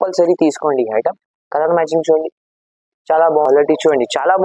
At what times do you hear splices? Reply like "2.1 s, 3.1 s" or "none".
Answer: 3.4 s